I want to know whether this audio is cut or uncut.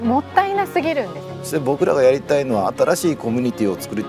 cut